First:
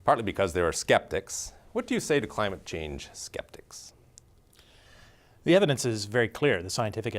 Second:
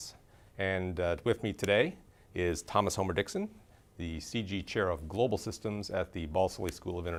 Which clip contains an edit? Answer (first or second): first